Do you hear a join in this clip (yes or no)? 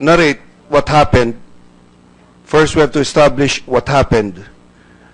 yes